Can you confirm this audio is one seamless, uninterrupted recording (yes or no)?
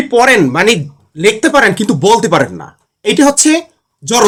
yes